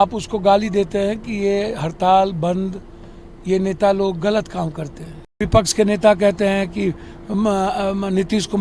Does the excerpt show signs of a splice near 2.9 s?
no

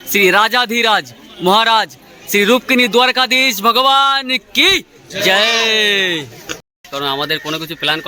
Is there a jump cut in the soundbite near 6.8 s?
yes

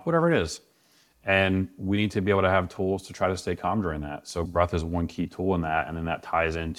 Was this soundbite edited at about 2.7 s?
no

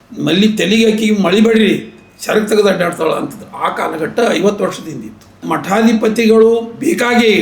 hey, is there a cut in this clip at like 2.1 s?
no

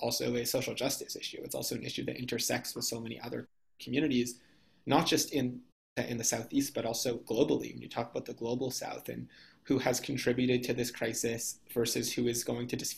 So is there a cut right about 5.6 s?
yes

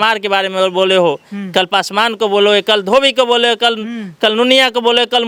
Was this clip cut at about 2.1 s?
no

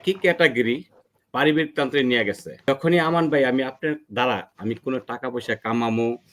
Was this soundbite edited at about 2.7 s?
yes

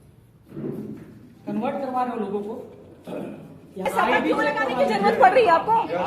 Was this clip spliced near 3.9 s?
yes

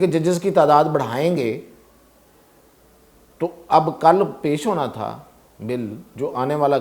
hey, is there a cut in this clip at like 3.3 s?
no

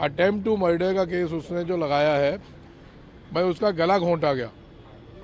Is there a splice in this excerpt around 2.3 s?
no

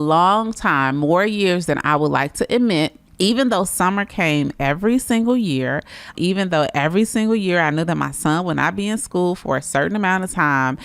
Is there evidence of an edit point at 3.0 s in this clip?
yes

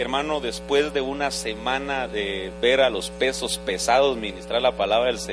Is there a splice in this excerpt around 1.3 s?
yes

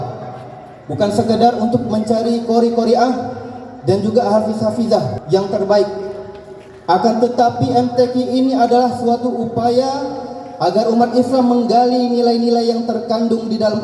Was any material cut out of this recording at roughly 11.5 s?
no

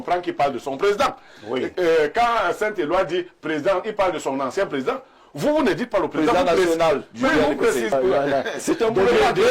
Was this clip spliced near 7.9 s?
yes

